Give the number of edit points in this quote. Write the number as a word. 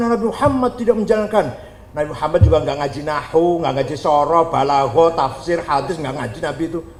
zero